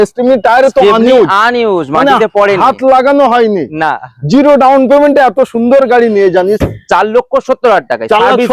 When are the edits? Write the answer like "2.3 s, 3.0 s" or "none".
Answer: 6.6 s